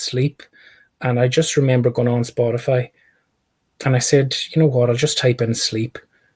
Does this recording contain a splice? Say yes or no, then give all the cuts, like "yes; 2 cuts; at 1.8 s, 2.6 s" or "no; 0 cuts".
no; 0 cuts